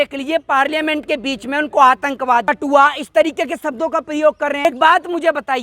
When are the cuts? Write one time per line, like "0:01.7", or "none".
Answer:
0:02.4
0:04.6